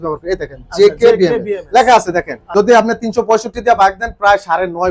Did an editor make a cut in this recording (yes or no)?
yes